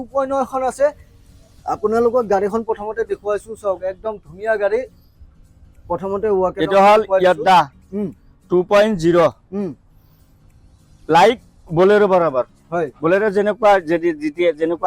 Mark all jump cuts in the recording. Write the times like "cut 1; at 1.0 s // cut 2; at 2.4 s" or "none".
none

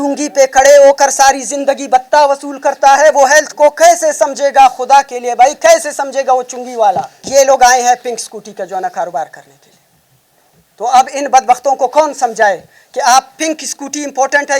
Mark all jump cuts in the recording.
cut 1; at 7.2 s

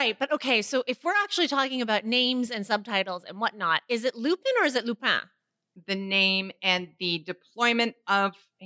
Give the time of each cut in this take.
cut 1; at 5.7 s

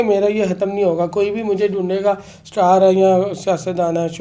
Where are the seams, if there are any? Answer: none

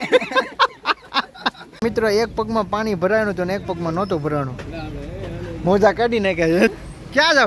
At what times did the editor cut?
cut 1; at 1.8 s // cut 2; at 6.7 s

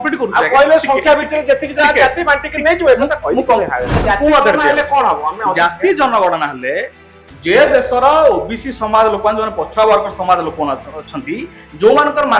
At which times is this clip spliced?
cut 1; at 4.0 s

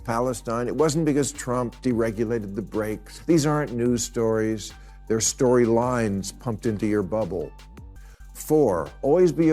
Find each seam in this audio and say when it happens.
cut 1; at 3.1 s

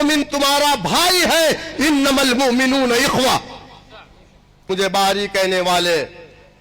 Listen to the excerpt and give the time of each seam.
cut 1; at 4.6 s

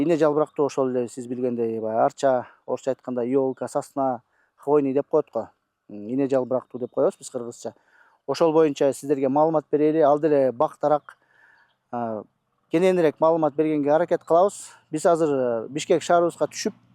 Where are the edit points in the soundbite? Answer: none

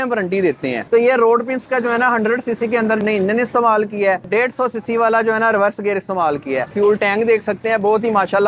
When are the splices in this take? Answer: cut 1; at 0.8 s // cut 2; at 4.2 s // cut 3; at 6.7 s

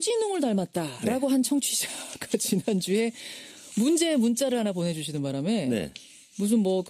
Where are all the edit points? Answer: none

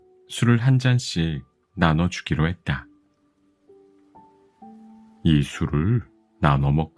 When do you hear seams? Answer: none

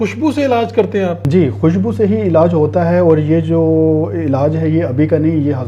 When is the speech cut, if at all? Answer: cut 1; at 1.2 s

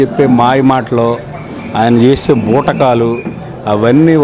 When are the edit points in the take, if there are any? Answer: none

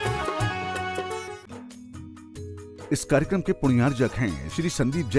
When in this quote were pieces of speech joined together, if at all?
cut 1; at 1.5 s

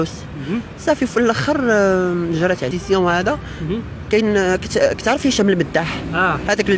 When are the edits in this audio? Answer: cut 1; at 2.7 s

